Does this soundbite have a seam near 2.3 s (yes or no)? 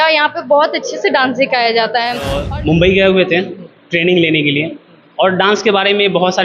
yes